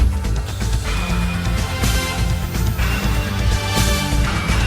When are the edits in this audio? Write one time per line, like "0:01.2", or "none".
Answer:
0:03.0